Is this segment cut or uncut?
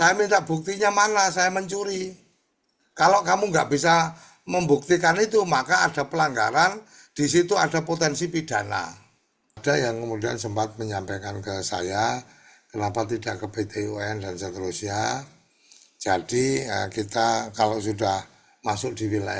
cut